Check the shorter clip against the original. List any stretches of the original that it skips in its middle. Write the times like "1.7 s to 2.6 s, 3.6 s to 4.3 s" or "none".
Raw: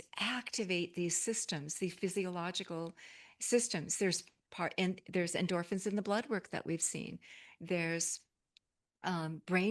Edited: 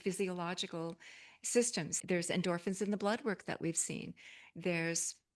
3.9 s to 5.0 s